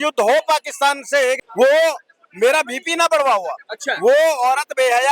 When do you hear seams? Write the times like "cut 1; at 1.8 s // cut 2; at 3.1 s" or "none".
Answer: cut 1; at 1.4 s